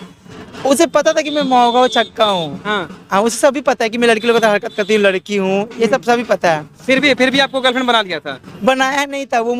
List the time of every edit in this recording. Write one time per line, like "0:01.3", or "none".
none